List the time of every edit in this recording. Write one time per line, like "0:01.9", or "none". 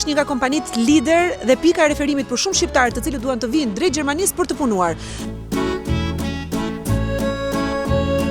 0:05.1